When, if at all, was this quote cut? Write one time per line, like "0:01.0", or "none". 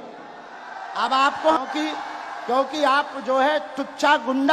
0:01.6